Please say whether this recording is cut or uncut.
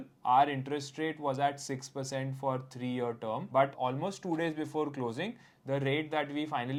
uncut